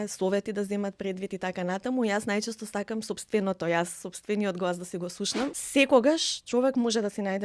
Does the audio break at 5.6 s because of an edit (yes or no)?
yes